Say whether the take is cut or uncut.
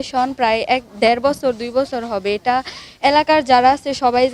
uncut